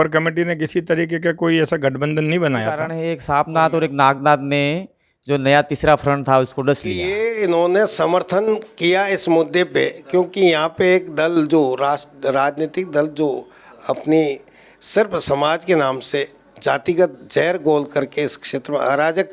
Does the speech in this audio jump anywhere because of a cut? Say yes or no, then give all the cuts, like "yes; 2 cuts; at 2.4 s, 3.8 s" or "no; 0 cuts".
yes; 2 cuts; at 2.9 s, 7.1 s